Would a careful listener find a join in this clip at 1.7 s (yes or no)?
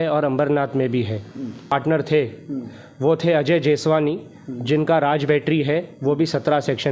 yes